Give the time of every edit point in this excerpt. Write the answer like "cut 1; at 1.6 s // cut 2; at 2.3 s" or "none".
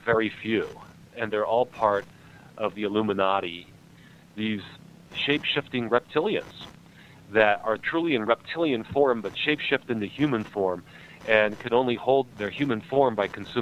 cut 1; at 1.1 s // cut 2; at 2.7 s // cut 3; at 3.9 s // cut 4; at 5.1 s // cut 5; at 7.8 s // cut 6; at 12.3 s